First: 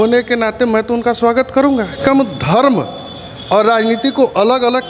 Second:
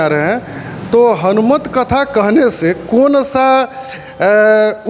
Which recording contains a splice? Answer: first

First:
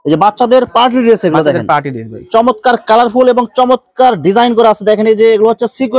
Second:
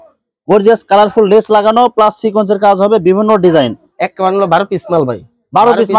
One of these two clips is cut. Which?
second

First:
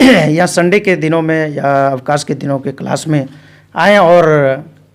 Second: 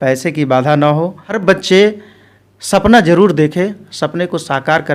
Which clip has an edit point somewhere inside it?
second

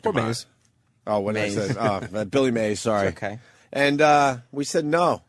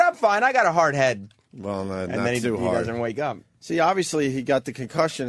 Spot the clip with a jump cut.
first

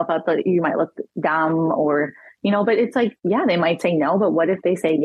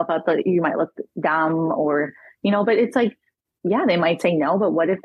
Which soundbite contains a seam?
first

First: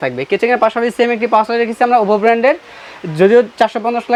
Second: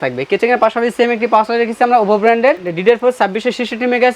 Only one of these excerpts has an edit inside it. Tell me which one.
second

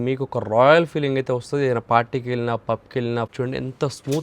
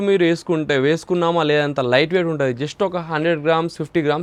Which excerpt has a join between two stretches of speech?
first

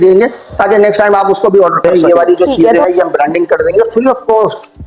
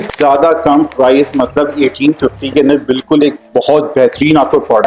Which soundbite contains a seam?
first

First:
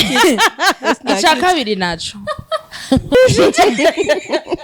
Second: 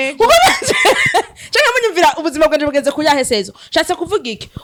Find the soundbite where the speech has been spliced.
first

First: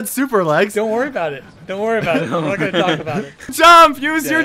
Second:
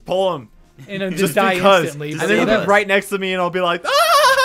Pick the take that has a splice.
first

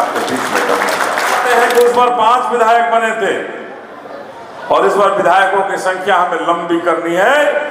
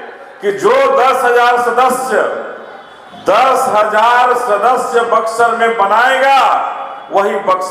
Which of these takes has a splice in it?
first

